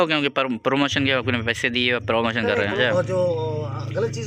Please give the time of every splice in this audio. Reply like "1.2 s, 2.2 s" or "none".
2.8 s